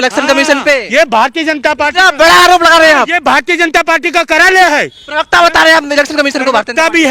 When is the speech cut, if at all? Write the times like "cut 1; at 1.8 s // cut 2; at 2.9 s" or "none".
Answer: none